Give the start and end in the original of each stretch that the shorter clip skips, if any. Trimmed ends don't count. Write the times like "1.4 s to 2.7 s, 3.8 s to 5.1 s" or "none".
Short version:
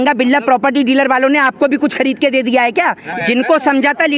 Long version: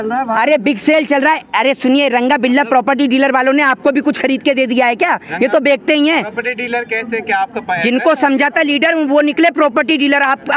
5.3 s to 7.6 s